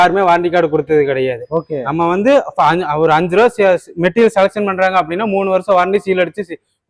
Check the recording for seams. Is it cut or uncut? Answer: uncut